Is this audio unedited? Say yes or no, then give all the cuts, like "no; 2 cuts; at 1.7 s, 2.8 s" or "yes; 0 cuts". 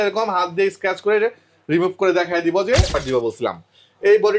no; 1 cut; at 2.9 s